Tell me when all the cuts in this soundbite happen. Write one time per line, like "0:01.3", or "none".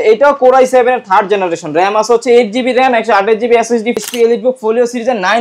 0:04.0